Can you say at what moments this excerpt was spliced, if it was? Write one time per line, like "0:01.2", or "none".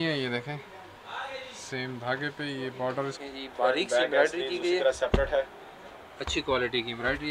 0:03.2